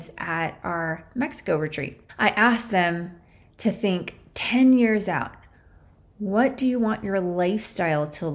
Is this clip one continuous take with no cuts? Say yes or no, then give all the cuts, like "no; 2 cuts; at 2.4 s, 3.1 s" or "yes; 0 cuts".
no; 1 cut; at 2.0 s